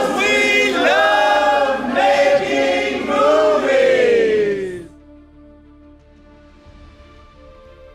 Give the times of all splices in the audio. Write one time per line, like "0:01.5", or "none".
none